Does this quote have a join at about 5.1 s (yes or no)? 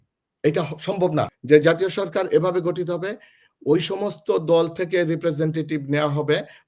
no